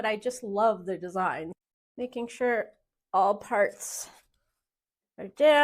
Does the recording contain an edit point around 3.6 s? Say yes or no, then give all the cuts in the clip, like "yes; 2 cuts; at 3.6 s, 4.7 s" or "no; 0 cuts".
no; 1 cut; at 1.5 s